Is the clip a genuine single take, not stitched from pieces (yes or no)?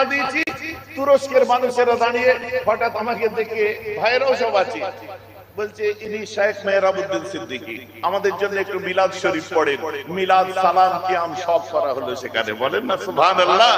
yes